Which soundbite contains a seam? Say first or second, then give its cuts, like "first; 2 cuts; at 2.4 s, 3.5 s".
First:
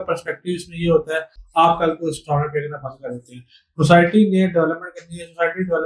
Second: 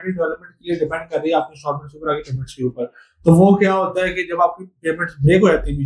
first; 1 cut; at 1.4 s